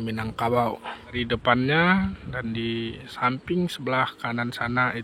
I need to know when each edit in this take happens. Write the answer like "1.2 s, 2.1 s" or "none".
1.2 s